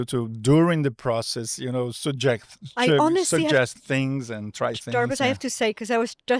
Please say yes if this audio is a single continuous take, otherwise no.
yes